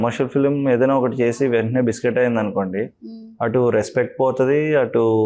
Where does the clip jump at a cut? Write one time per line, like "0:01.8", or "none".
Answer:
none